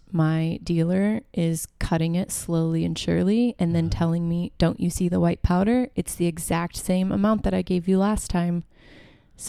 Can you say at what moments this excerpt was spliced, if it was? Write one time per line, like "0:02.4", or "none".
none